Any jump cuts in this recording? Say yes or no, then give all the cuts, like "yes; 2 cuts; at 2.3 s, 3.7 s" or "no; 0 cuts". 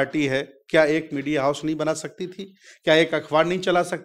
no; 0 cuts